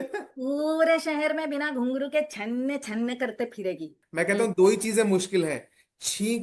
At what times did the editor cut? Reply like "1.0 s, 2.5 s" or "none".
4.0 s